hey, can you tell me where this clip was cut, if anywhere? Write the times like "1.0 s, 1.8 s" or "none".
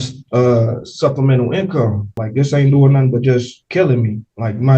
2.1 s